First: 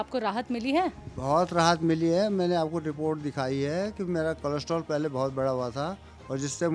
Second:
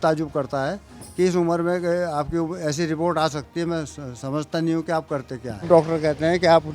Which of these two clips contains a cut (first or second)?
second